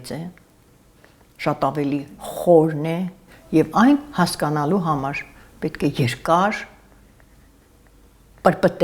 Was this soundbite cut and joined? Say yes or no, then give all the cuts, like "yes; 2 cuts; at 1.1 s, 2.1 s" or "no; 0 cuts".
no; 0 cuts